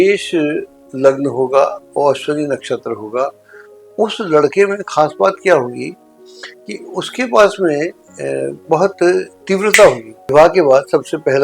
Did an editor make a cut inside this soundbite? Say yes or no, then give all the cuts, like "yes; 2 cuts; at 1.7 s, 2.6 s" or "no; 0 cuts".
yes; 1 cut; at 10.1 s